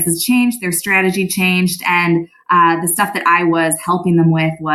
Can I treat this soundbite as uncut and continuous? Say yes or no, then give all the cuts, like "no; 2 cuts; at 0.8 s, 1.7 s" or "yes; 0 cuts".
yes; 0 cuts